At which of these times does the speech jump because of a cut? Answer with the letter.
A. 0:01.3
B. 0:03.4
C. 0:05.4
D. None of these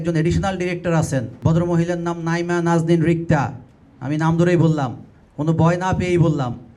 A